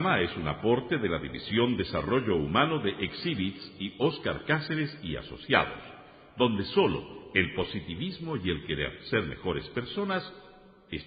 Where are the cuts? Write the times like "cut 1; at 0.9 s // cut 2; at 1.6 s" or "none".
none